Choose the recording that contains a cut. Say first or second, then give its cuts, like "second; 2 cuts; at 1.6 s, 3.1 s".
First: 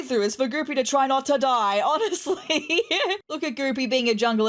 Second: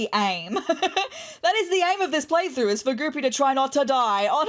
first; 1 cut; at 3.3 s